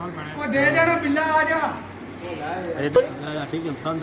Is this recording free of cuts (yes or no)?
no